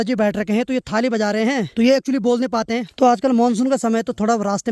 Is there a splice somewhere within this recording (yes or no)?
yes